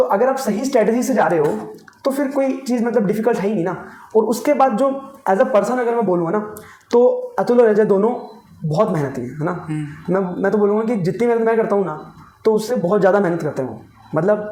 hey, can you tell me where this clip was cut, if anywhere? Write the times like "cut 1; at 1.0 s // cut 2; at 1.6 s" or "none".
none